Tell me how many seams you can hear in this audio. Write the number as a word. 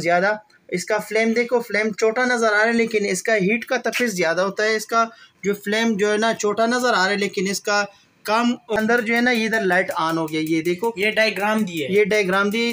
one